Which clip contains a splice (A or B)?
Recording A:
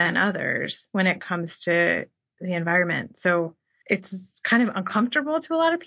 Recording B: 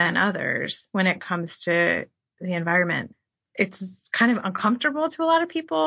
B